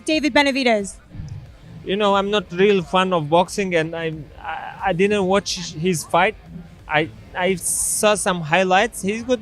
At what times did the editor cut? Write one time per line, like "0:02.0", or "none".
none